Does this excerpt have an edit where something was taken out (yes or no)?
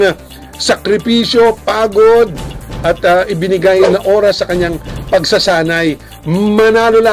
yes